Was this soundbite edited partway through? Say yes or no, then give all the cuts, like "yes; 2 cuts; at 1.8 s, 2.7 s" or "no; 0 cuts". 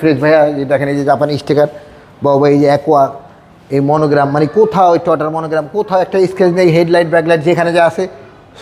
no; 0 cuts